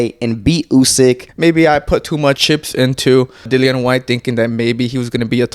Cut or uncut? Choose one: cut